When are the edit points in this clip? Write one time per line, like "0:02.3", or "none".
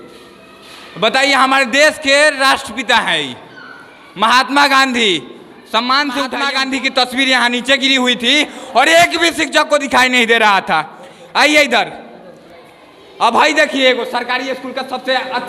0:06.4